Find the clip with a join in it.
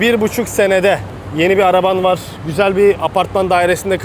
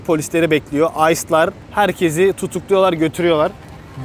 first; 2 cuts; at 1.2 s, 2.4 s

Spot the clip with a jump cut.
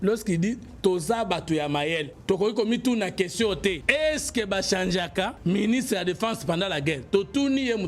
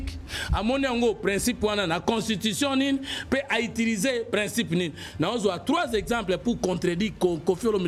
first; 3 cuts; at 2.1 s, 3.8 s, 5.4 s

